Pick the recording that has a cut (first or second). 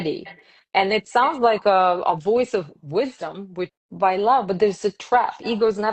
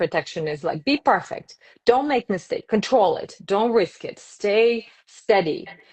first